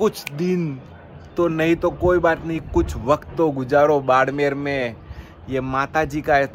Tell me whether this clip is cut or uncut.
uncut